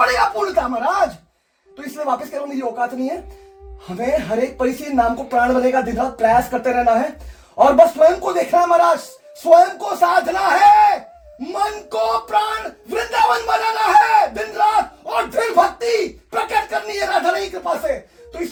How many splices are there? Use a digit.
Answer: 0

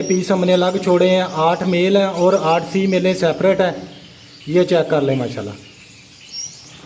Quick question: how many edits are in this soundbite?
0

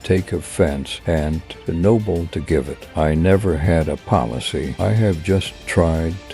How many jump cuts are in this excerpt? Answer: 2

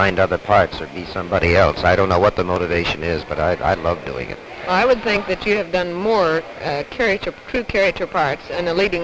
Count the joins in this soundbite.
1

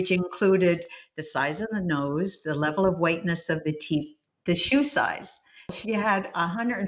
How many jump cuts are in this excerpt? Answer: 1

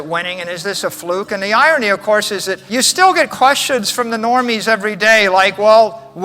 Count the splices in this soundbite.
1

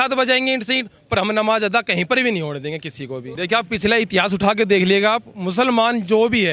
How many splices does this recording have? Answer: 0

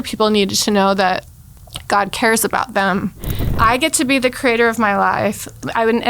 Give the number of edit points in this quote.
1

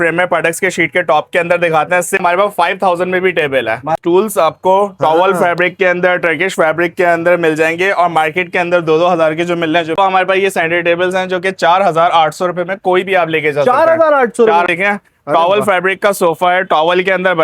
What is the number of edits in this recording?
4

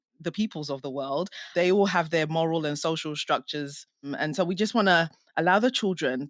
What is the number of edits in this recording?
2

